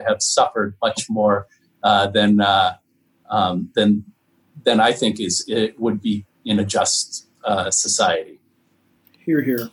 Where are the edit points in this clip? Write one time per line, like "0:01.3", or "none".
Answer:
none